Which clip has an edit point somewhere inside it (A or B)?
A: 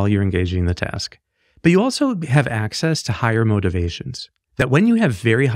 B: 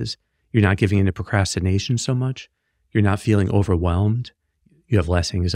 A